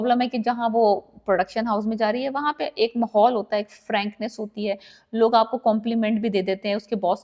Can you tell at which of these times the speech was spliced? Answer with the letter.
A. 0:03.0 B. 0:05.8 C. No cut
C